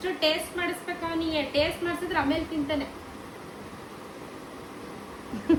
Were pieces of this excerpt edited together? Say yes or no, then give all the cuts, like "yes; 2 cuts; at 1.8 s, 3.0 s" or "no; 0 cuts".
no; 0 cuts